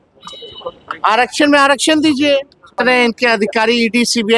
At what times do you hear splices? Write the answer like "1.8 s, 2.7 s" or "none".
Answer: 2.8 s

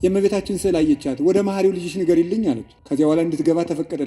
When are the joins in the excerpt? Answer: 2.7 s

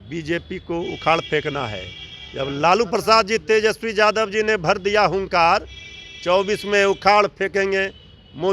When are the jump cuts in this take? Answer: none

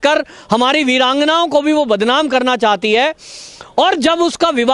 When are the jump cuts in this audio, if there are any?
none

